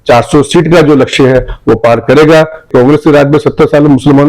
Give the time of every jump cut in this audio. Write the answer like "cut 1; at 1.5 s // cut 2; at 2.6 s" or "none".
cut 1; at 2.7 s

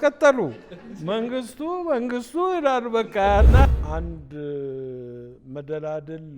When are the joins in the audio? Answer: cut 1; at 3.7 s

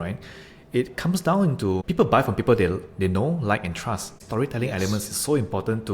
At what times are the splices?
cut 1; at 1.8 s // cut 2; at 4.2 s

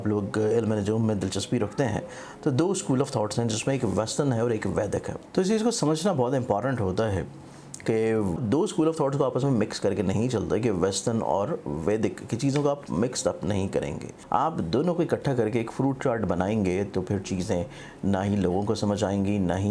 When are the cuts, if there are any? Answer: cut 1; at 5.2 s // cut 2; at 8.3 s // cut 3; at 14.1 s

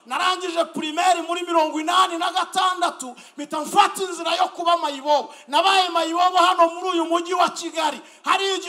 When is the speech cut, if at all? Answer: none

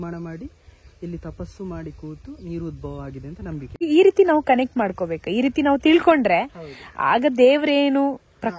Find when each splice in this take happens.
cut 1; at 3.8 s

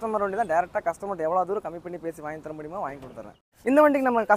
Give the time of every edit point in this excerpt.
cut 1; at 3.4 s

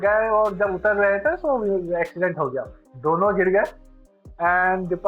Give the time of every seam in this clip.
none

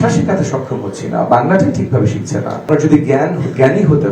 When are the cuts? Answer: cut 1; at 2.7 s

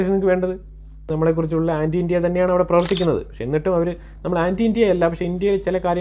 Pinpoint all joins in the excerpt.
cut 1; at 1.1 s

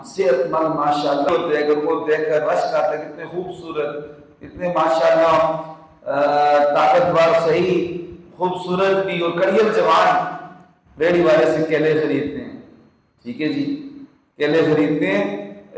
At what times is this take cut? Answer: cut 1; at 1.3 s

